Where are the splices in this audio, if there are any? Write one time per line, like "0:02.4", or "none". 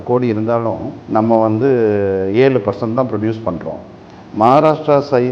0:00.9